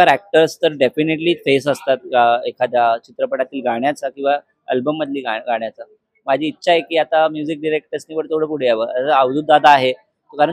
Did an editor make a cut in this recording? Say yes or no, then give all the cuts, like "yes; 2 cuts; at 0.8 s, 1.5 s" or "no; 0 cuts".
no; 0 cuts